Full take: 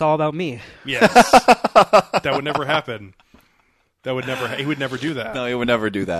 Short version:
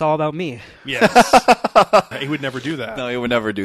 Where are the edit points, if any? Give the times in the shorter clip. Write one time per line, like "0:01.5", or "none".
0:02.1